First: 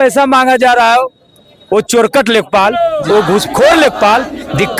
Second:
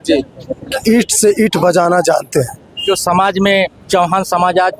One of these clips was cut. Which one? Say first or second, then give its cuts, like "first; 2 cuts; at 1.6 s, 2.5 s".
second; 1 cut; at 2.8 s